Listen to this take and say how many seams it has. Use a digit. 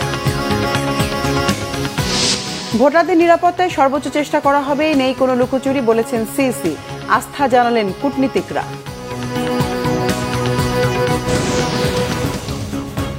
1